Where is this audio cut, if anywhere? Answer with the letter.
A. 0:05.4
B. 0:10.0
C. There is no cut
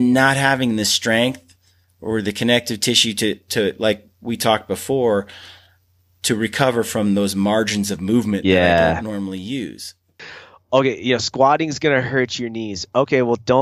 B